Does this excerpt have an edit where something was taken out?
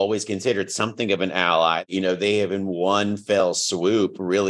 yes; 1 cut; at 1.9 s

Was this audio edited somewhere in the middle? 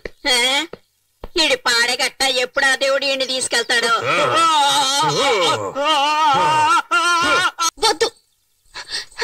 yes; 1 cut; at 7.6 s

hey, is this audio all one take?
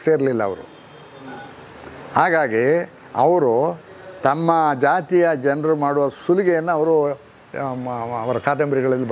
yes; 0 cuts

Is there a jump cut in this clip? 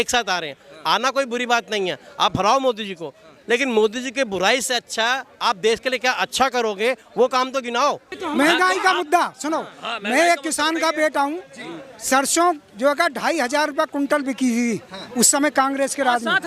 yes; 1 cut; at 8.1 s

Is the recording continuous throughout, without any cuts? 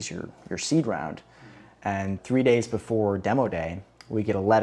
no; 1 cut; at 1.9 s

